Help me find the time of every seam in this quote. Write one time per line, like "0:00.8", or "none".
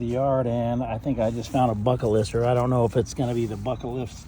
none